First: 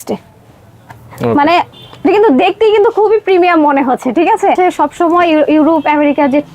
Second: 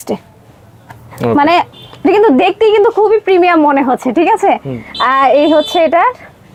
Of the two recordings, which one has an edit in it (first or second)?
first